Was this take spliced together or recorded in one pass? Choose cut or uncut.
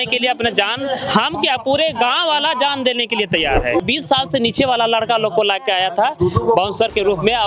cut